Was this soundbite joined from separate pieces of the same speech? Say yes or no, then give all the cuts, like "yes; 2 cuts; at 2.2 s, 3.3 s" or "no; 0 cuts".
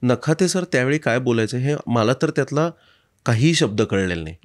no; 0 cuts